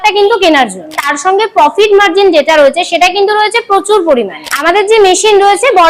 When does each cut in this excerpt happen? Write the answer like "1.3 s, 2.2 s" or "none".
1.1 s, 4.4 s